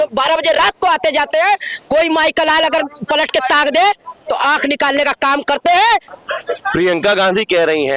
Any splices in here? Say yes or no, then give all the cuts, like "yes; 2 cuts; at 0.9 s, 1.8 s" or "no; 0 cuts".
yes; 1 cut; at 6.1 s